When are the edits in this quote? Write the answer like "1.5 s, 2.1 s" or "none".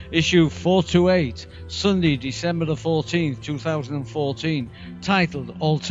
1.9 s